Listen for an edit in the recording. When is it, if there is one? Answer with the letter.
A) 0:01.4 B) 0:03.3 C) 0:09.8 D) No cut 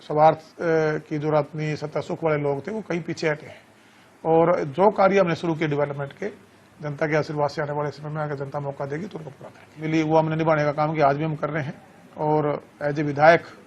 C